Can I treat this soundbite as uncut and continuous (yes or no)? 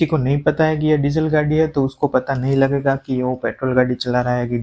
yes